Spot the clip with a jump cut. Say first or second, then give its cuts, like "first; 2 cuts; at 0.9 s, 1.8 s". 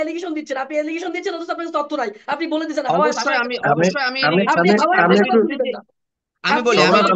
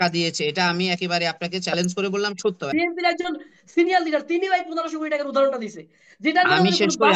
second; 1 cut; at 2.7 s